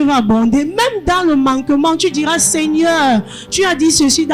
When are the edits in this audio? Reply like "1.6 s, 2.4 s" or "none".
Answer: none